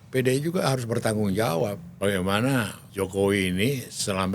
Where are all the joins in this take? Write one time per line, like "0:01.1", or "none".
0:01.9
0:02.8